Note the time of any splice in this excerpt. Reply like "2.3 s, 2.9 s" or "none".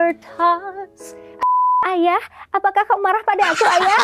1.4 s